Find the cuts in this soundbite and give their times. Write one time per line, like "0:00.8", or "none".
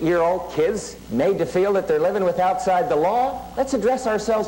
0:01.0

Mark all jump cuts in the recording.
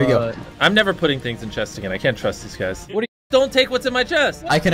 0:03.2

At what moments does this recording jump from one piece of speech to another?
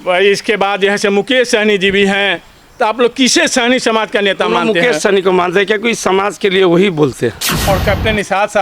0:07.5

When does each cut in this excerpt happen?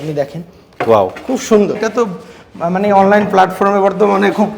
0:01.8

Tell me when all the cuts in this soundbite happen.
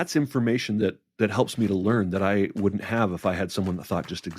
0:01.0

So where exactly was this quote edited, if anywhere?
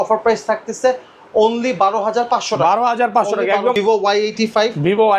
0:03.8

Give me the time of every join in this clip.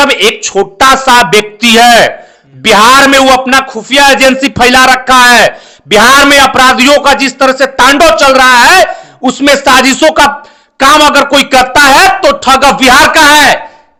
none

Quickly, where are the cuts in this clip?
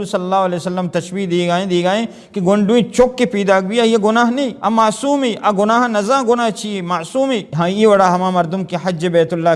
0:04.5
0:07.5

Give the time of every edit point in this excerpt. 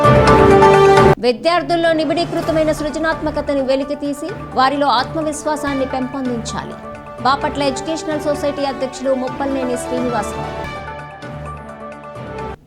0:01.1

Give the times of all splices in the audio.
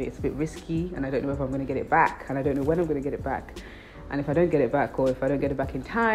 none

